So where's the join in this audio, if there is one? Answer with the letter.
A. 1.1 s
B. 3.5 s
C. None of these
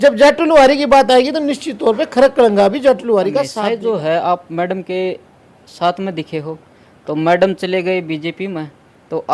B